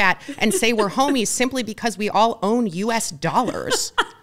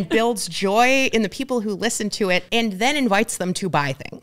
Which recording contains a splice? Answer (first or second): second